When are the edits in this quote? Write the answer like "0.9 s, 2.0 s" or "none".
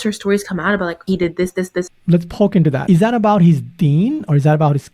1.9 s, 2.8 s